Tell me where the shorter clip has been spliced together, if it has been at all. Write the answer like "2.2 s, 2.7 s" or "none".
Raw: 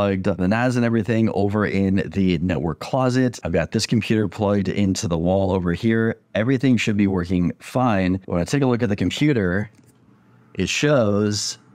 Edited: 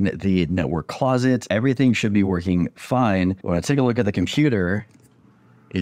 1.4 s